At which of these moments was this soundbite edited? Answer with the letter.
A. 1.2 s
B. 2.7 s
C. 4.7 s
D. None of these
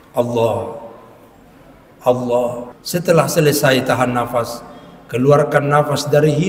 B